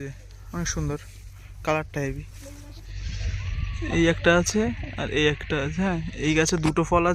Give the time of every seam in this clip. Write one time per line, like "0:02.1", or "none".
0:02.6